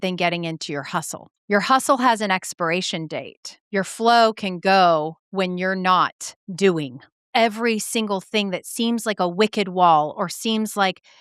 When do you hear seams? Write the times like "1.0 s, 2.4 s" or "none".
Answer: 7.2 s